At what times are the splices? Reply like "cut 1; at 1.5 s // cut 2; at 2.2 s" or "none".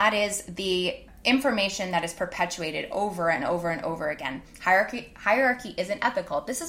cut 1; at 1.1 s